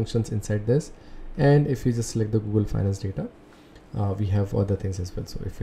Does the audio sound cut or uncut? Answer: uncut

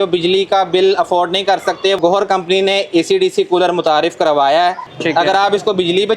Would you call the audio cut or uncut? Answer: cut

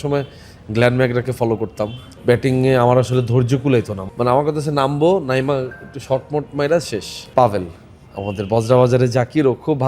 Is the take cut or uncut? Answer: cut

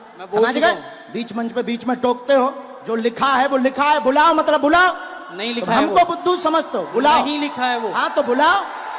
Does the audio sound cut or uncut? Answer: uncut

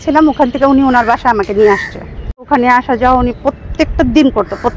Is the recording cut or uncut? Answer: cut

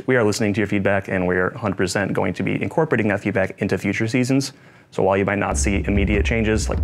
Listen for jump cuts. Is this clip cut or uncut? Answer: uncut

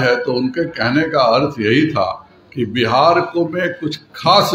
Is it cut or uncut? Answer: uncut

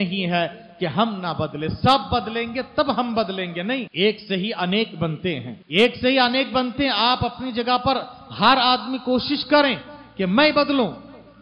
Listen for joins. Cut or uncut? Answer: cut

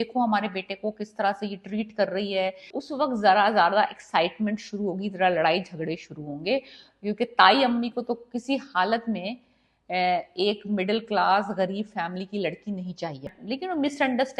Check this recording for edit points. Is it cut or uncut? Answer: cut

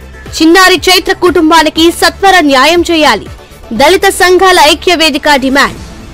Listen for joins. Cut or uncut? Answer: uncut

